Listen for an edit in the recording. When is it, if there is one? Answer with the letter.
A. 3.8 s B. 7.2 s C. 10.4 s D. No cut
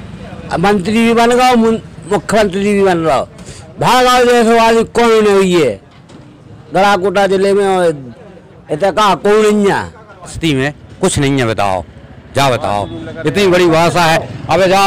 C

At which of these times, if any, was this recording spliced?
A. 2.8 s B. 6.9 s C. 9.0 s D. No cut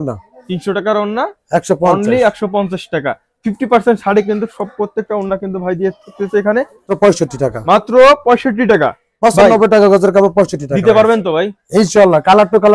B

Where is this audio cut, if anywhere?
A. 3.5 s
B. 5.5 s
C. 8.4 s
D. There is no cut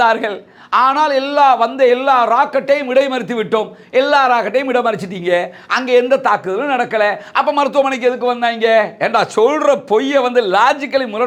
D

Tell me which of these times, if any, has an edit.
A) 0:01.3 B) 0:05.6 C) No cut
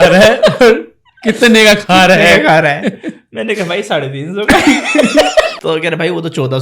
B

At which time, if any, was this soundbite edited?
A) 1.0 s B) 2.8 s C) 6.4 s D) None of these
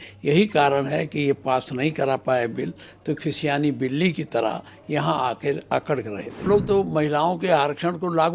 C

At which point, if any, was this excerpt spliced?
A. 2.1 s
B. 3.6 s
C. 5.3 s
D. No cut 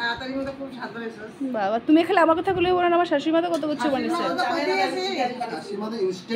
D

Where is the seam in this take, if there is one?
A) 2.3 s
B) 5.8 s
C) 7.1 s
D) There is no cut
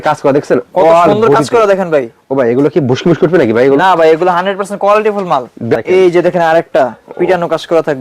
B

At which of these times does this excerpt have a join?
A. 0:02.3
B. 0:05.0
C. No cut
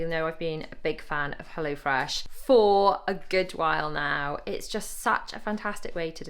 A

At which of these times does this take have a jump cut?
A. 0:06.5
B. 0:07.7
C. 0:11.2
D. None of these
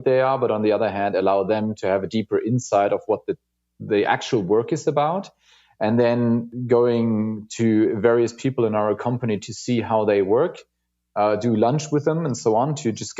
A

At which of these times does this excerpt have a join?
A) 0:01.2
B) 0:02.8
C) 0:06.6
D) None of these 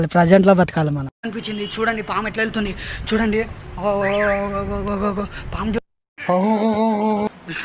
D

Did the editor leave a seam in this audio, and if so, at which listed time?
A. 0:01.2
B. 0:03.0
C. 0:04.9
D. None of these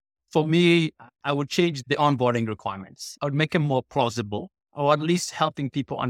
A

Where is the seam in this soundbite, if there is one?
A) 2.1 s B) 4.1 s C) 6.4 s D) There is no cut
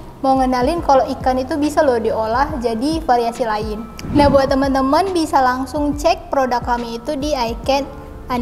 B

